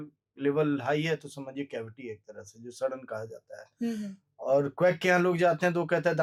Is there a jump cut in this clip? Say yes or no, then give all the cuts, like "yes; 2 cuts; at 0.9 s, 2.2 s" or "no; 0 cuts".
no; 0 cuts